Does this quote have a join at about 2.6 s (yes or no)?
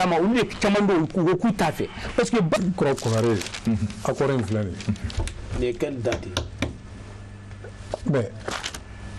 yes